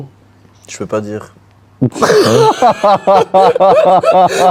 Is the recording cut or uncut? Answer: uncut